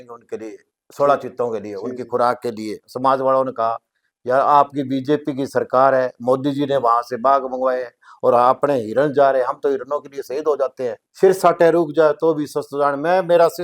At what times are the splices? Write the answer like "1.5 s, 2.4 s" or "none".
2.8 s, 11.1 s

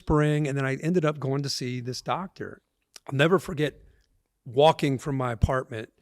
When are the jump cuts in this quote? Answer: 2.6 s

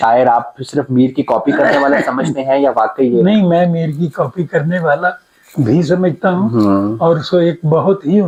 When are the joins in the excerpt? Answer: none

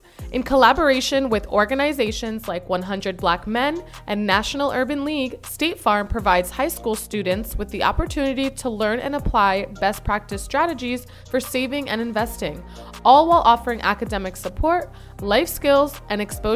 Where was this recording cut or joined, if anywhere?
none

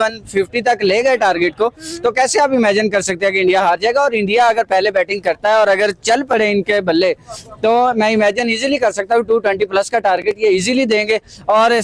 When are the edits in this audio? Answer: none

